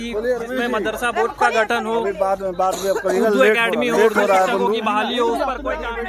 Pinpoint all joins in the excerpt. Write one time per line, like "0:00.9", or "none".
none